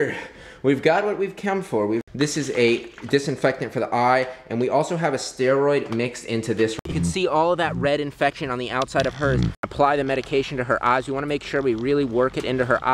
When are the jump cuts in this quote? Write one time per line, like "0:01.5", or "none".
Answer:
0:02.1
0:06.8
0:09.7